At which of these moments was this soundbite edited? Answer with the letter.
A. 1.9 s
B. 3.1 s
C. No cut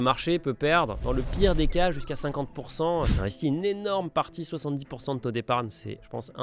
B